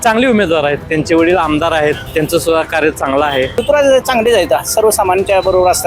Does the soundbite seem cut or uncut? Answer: cut